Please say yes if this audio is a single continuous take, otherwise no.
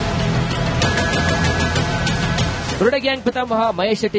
no